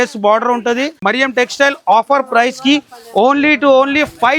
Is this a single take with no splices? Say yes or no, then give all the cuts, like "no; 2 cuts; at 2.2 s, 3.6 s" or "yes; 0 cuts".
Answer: no; 1 cut; at 1.0 s